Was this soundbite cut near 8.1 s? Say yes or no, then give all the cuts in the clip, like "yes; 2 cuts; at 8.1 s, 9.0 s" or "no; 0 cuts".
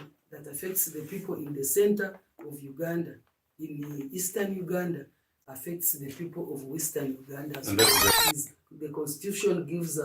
yes; 1 cut; at 8.1 s